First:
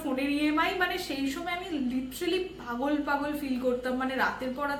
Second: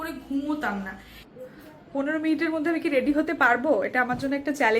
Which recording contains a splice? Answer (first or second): second